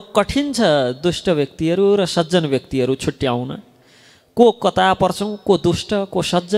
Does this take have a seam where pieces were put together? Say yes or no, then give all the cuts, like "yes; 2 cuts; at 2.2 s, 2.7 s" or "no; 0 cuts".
no; 0 cuts